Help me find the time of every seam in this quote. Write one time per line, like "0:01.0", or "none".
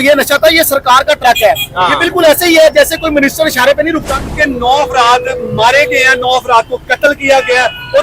0:04.1